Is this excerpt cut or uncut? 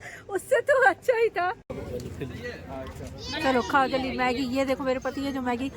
cut